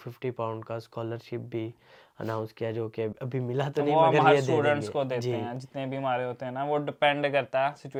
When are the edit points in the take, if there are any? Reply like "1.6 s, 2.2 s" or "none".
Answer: none